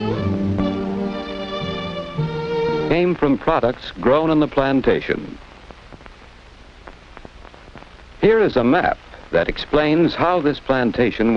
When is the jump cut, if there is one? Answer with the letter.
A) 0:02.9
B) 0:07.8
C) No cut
C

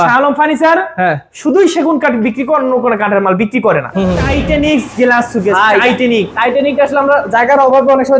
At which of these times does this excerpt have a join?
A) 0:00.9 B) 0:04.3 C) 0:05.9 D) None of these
B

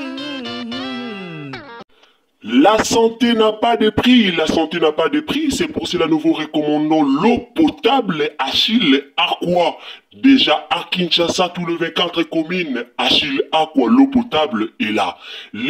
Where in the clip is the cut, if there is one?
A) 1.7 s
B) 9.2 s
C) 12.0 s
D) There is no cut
A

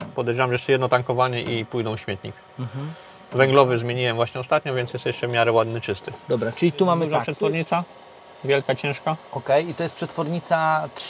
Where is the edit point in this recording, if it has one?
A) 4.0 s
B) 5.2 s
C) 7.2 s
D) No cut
C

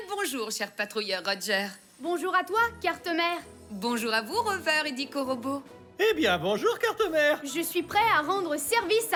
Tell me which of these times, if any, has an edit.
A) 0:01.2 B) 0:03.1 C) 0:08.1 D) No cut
D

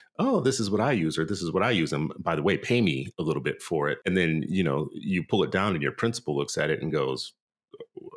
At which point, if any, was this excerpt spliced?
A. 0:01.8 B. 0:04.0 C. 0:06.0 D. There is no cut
B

